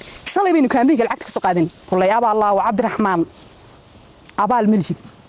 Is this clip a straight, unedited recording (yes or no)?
no